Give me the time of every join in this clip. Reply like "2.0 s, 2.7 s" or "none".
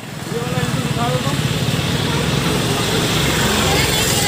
none

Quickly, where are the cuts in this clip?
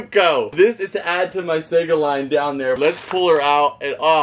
2.8 s

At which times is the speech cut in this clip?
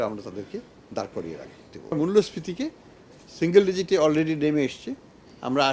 1.9 s

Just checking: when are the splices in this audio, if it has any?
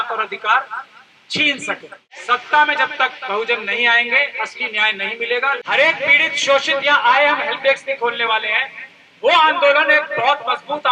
2.1 s, 5.6 s

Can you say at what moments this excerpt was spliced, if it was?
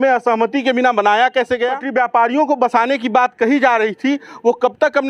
1.8 s

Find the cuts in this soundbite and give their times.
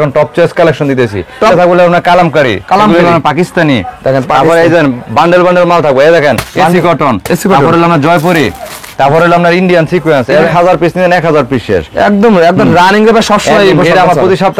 1.5 s, 10.5 s

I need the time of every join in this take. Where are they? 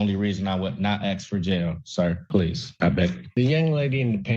2.2 s

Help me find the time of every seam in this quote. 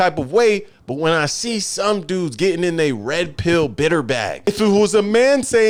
none

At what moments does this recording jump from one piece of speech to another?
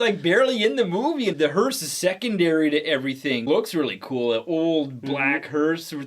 1.3 s, 3.4 s

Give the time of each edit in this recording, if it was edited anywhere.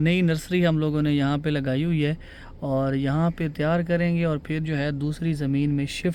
none

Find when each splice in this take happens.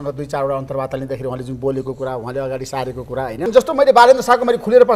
3.4 s

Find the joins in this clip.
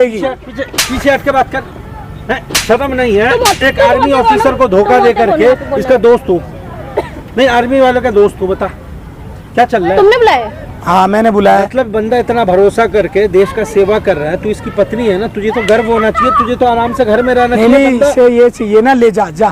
none

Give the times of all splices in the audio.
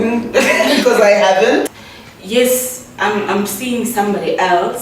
1.8 s

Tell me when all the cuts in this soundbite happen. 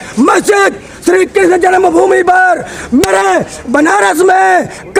none

